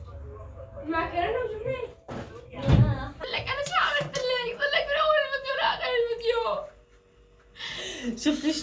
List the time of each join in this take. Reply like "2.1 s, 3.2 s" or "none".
3.2 s